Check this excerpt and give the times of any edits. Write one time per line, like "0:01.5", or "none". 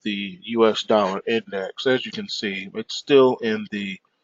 none